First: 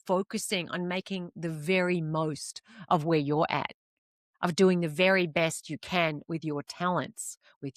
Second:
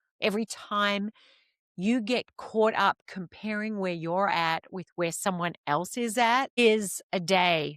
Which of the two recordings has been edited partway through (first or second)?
second